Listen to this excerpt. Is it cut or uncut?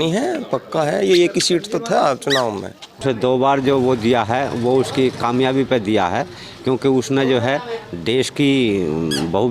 cut